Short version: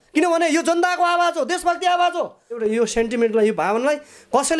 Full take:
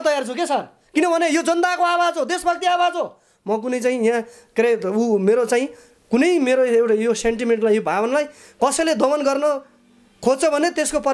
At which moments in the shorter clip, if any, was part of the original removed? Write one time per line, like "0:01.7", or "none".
0:02.6